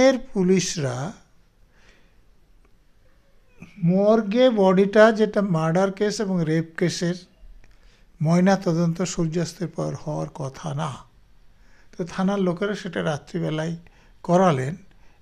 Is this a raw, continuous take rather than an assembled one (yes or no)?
yes